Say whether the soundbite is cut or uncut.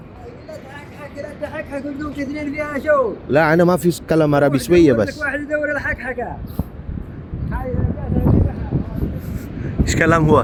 uncut